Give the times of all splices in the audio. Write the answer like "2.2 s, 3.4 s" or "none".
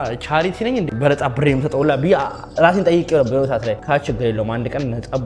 0.9 s, 3.8 s